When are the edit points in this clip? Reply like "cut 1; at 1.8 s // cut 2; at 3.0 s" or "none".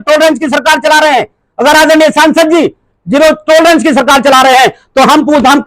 none